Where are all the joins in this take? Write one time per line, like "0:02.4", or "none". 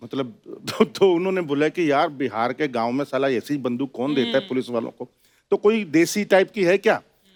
none